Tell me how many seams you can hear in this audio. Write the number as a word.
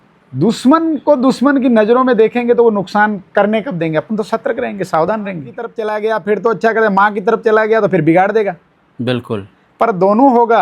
one